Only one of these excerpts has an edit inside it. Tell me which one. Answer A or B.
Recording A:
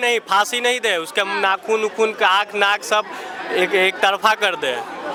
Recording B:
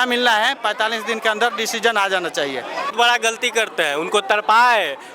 B